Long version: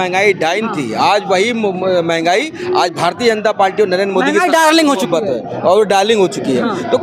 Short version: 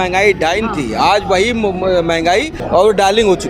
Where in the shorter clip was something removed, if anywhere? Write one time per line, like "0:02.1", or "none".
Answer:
0:02.6